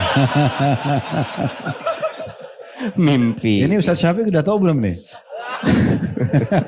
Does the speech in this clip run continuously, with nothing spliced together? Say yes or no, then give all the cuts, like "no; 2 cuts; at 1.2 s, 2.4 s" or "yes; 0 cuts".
yes; 0 cuts